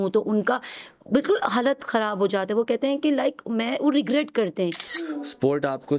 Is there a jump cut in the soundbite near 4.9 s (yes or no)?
yes